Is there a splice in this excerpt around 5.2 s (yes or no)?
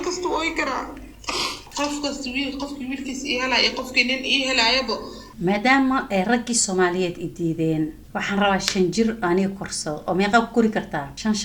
yes